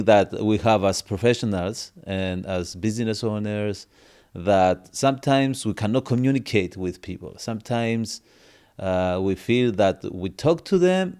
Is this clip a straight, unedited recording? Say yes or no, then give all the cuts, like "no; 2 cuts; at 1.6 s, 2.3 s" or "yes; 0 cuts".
yes; 0 cuts